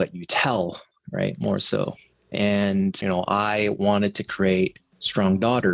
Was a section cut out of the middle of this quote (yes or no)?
no